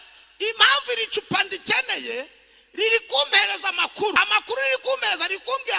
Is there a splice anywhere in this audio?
yes; 1 cut; at 4.1 s

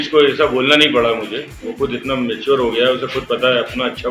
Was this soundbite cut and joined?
no; 0 cuts

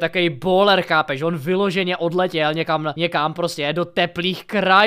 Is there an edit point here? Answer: yes; 1 cut; at 2.9 s

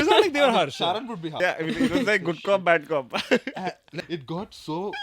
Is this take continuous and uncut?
no; 2 cuts; at 1.2 s, 3.9 s

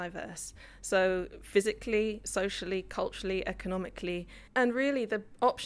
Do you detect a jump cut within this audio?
yes; 1 cut; at 4.4 s

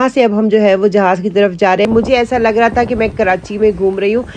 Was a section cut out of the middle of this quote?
yes; 1 cut; at 1.9 s

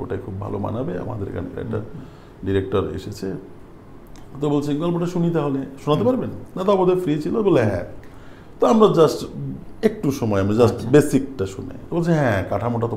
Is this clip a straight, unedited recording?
yes; 0 cuts

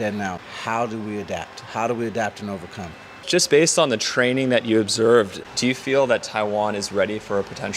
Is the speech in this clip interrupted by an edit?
yes; 1 cut; at 3.2 s

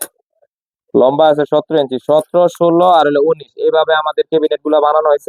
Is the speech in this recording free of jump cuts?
yes; 0 cuts

